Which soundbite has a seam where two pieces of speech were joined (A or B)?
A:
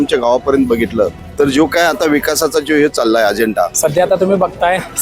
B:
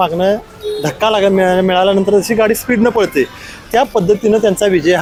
A